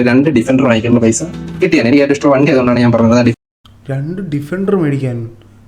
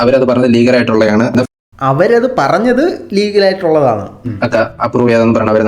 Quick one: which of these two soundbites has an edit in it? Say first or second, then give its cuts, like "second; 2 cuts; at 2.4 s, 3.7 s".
second; 1 cut; at 4.4 s